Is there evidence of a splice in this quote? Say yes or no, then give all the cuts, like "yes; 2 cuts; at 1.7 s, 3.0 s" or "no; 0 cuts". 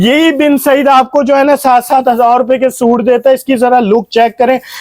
no; 0 cuts